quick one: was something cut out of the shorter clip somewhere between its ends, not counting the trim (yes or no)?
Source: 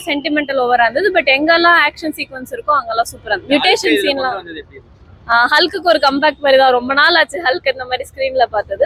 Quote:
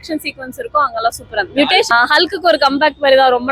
yes